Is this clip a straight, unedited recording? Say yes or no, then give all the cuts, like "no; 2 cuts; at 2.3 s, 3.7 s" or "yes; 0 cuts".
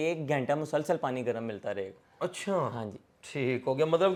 yes; 0 cuts